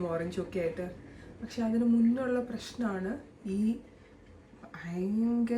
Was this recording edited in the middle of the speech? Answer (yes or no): no